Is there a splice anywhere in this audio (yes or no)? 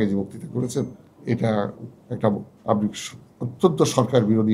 yes